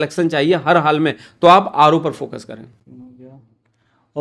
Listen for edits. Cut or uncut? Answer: uncut